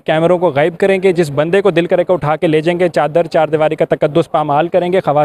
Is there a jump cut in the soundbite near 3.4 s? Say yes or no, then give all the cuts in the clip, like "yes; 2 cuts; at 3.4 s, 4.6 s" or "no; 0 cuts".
no; 0 cuts